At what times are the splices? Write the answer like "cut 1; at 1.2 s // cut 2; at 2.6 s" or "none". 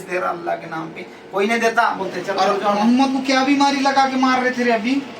cut 1; at 2.6 s